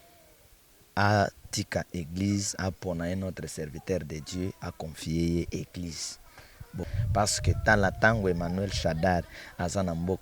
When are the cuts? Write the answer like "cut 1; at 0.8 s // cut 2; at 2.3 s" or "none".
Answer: cut 1; at 6.8 s

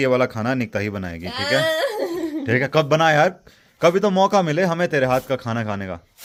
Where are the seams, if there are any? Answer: none

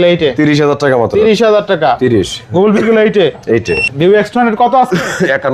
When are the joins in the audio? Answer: cut 1; at 3.9 s

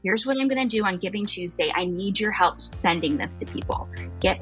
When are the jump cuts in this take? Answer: none

